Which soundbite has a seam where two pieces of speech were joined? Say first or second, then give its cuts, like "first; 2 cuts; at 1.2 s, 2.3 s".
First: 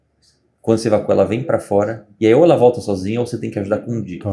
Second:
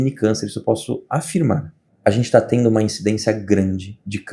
second; 1 cut; at 1.8 s